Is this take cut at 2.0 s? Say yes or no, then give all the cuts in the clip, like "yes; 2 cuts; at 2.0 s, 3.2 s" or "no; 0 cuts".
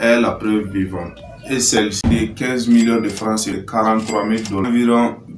yes; 2 cuts; at 2.0 s, 3.6 s